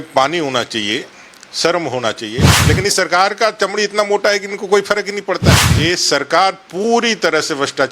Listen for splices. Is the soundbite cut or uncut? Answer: cut